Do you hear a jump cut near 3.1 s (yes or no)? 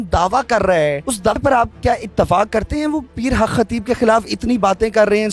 no